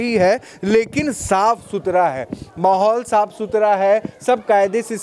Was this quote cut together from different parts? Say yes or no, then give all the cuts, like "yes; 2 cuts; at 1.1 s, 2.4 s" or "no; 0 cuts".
no; 0 cuts